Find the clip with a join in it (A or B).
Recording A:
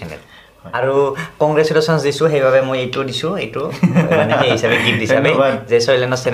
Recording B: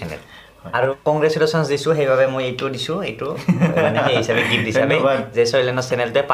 B